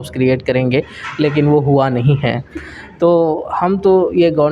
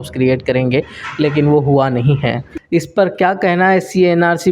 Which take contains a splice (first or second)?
second